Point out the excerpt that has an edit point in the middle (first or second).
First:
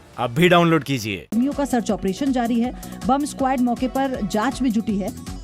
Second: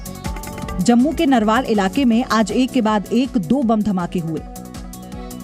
first